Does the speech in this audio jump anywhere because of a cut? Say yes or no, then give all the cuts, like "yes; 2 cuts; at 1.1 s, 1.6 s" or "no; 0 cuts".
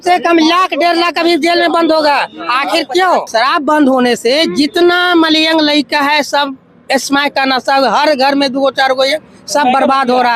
yes; 1 cut; at 3.3 s